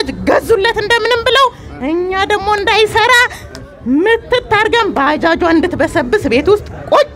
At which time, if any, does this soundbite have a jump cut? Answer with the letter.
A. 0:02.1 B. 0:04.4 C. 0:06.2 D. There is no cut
D